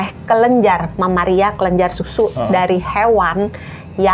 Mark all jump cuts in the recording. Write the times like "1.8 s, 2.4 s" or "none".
none